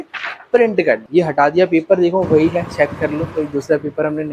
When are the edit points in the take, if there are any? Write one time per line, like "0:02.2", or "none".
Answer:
0:01.0